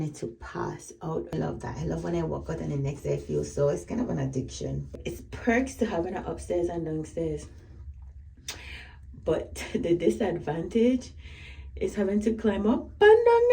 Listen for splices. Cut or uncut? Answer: cut